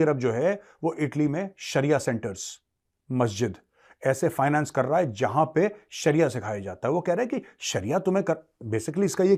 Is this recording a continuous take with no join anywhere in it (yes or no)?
yes